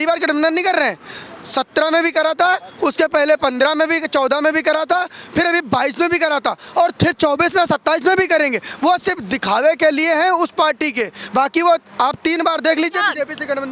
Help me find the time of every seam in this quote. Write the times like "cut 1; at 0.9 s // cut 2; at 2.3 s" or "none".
none